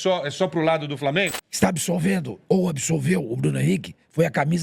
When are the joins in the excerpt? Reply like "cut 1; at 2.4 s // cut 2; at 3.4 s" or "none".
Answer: cut 1; at 1.4 s